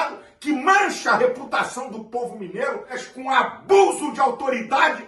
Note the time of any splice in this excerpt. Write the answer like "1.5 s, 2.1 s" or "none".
3.0 s